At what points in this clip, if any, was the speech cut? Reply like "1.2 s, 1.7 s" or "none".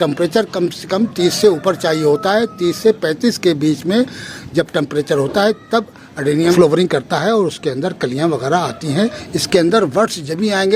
6.5 s, 9.3 s